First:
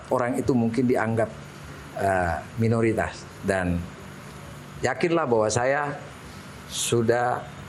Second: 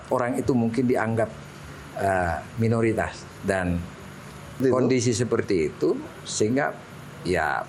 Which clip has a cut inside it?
second; 1 cut; at 4.6 s

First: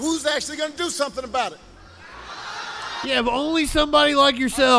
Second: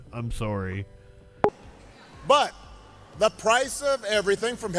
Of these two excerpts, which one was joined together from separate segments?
second; 1 cut; at 1.5 s

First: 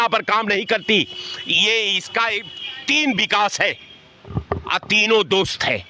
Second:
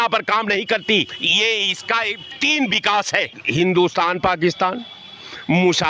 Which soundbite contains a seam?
second; 3 cuts; at 1.2 s, 2.2 s, 3.4 s

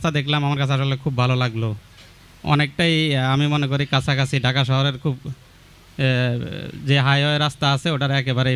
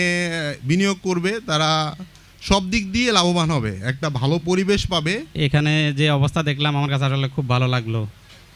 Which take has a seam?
second; 1 cut; at 5.3 s

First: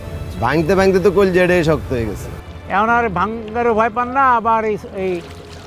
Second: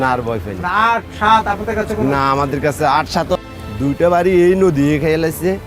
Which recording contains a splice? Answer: second; 1 cut; at 3.4 s

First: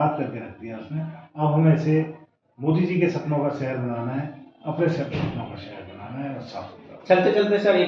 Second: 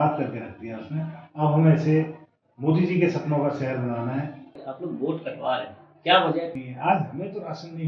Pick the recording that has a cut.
second; 2 cuts; at 4.5 s, 6.5 s

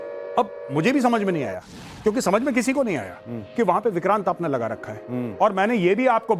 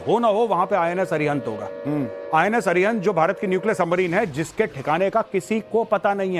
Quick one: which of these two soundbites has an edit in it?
second; 1 cut; at 3.1 s

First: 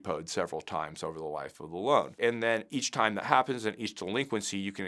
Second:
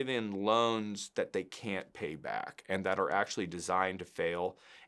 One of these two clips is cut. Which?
first; 1 cut; at 2.5 s

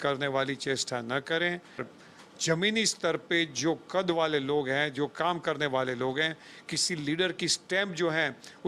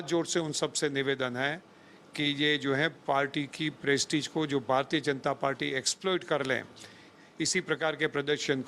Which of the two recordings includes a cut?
first; 1 cut; at 1.9 s

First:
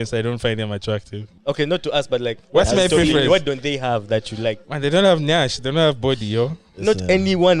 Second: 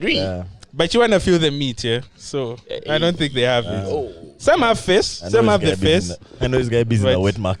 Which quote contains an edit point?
first; 2 cuts; at 1.3 s, 4.7 s

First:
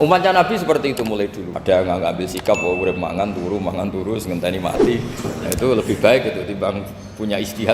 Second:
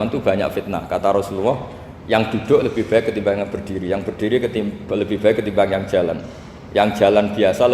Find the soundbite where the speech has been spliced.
first; 1 cut; at 1.5 s

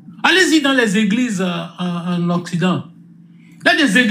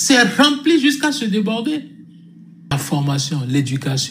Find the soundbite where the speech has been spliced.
second; 1 cut; at 2.7 s

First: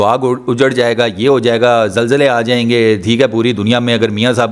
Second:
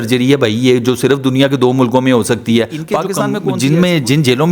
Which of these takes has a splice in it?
second; 1 cut; at 3.3 s

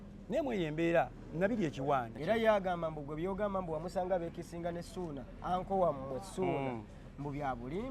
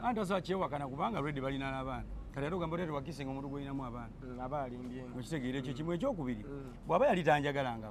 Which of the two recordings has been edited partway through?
first; 1 cut; at 2.1 s

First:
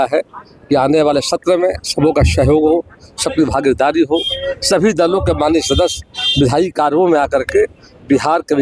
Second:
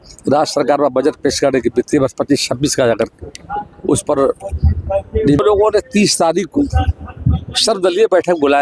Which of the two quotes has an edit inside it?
second; 1 cut; at 5.4 s

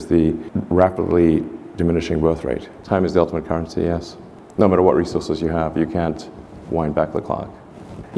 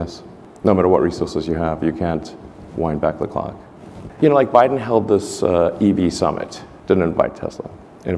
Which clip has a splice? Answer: first; 1 cut; at 2.7 s

